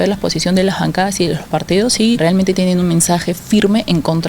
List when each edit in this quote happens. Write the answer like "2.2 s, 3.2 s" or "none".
2.2 s